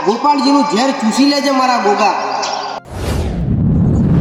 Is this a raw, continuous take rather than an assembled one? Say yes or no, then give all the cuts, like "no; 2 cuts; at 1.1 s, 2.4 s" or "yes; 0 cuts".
yes; 0 cuts